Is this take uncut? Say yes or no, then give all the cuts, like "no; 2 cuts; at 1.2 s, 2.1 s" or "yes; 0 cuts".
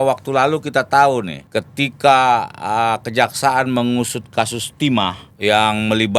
no; 2 cuts; at 1.4 s, 5.2 s